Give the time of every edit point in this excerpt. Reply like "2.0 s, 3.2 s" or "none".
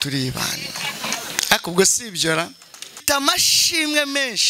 3.0 s